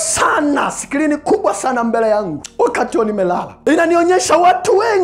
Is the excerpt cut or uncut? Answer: cut